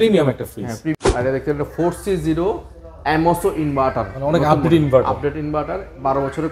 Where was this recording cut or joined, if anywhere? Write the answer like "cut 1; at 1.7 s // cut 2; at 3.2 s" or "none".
cut 1; at 1.0 s